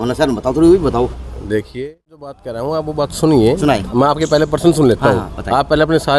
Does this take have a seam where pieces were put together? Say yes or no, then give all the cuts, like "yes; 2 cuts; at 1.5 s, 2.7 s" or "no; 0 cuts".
yes; 1 cut; at 2.5 s